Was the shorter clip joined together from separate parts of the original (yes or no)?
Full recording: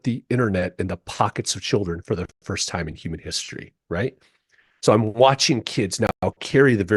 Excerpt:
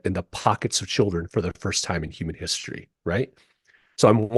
yes